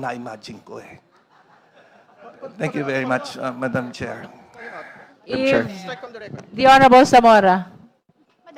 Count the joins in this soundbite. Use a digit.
0